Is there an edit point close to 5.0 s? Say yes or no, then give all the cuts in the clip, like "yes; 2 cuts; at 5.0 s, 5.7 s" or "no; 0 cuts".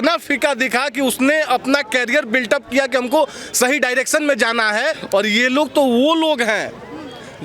yes; 1 cut; at 5.0 s